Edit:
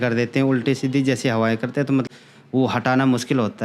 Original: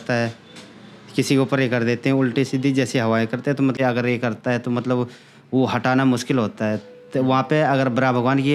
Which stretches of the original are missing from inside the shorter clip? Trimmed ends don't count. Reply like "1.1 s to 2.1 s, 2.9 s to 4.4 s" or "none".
3.8 s to 5.1 s